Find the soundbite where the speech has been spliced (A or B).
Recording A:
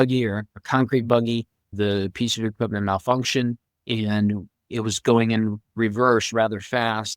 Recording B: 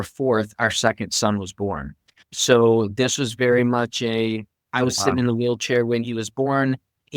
A